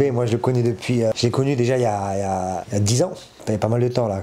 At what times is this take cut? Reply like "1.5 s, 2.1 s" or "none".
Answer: 1.1 s, 2.7 s, 3.3 s